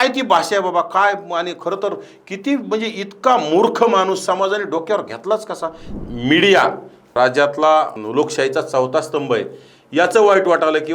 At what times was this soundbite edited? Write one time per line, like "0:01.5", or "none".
0:05.8
0:07.1
0:08.0

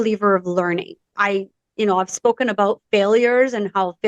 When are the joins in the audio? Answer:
0:01.1

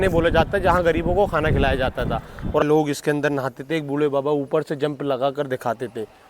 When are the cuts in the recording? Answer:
0:02.6

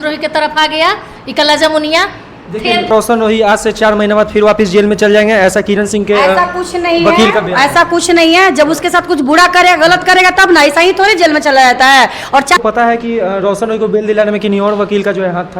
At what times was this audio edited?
0:02.9
0:12.6

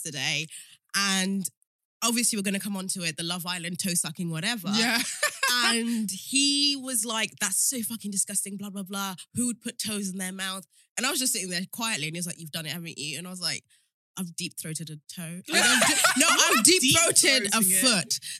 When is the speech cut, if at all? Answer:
none

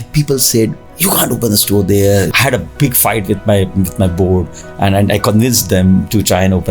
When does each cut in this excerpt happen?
0:02.3

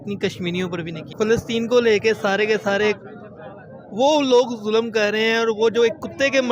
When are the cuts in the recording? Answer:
0:01.0

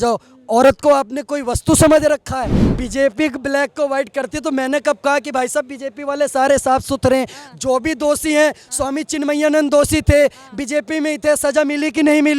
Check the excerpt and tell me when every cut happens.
0:02.7

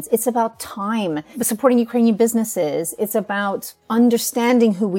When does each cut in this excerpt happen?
0:01.4
0:03.7

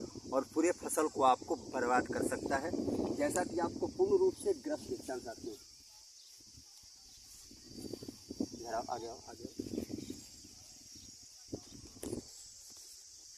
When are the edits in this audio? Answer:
0:04.8

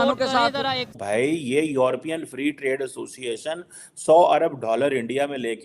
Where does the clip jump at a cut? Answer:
0:01.0

